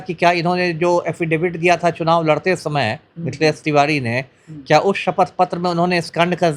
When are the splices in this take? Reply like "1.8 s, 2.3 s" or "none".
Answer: none

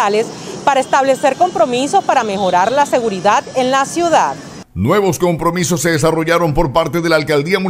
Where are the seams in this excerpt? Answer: none

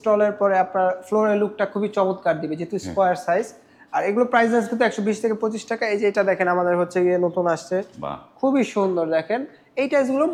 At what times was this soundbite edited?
none

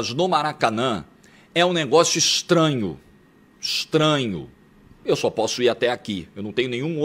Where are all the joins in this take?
none

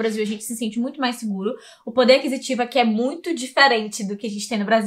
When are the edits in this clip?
none

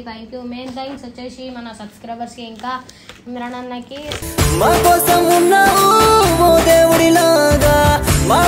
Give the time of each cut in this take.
none

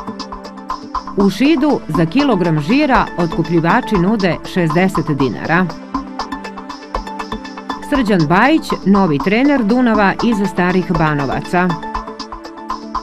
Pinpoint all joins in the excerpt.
1.0 s

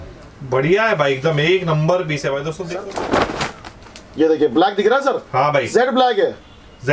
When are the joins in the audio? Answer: 2.6 s

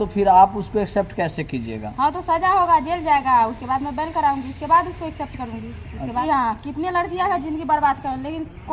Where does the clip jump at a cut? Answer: 6.2 s

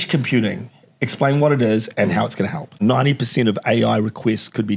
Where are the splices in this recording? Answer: 2.8 s

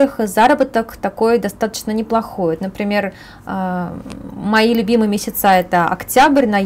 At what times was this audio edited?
none

